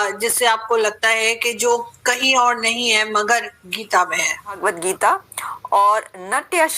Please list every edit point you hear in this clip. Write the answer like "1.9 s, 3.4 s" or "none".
4.6 s